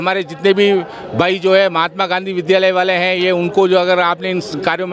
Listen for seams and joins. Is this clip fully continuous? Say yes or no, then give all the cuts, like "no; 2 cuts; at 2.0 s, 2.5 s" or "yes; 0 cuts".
yes; 0 cuts